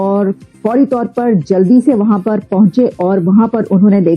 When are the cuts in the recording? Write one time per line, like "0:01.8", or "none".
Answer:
none

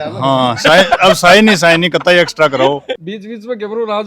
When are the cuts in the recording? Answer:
0:02.9

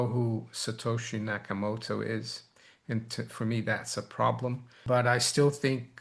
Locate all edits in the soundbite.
0:04.7

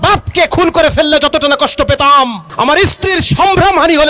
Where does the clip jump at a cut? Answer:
0:02.4

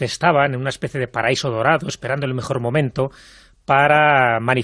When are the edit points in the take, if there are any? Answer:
none

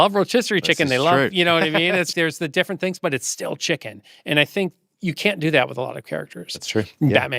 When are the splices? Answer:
0:02.1

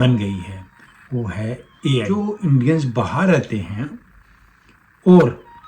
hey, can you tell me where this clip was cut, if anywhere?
0:02.0

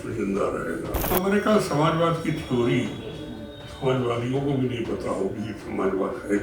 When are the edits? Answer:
0:01.0

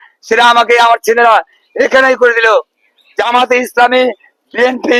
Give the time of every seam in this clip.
none

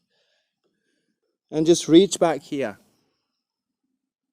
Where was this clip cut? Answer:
0:01.1

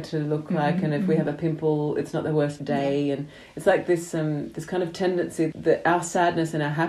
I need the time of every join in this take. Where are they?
0:02.6
0:05.5

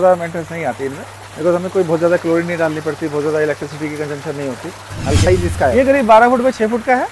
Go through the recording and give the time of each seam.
0:05.3

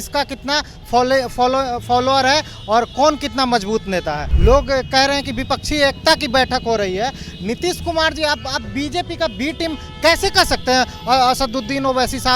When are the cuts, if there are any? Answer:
0:04.3

